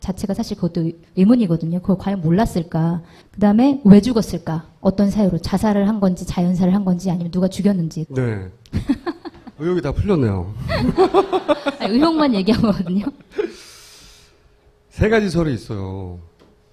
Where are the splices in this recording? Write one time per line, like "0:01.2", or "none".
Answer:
none